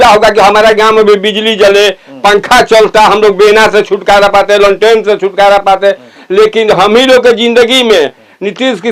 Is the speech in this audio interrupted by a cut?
no; 0 cuts

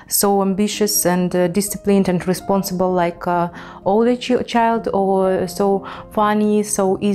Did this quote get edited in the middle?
no; 0 cuts

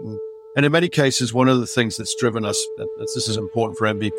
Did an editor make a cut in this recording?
no; 0 cuts

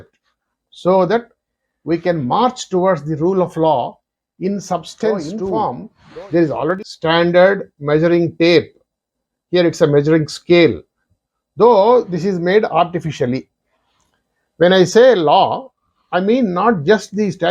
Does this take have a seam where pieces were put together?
yes; 2 cuts; at 5.4 s, 6.8 s

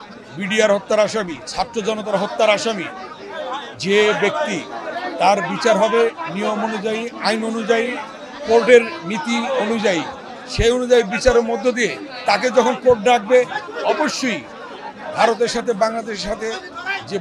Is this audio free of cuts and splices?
yes; 0 cuts

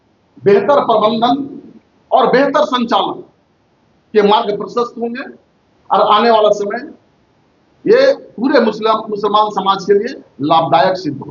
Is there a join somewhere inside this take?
no; 0 cuts

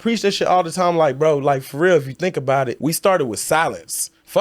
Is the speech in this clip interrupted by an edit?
yes; 1 cut; at 2.7 s

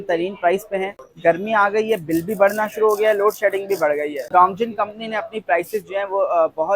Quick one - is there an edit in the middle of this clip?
yes; 2 cuts; at 1.0 s, 4.3 s

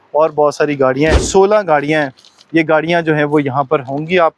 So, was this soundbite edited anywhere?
yes; 1 cut; at 1.2 s

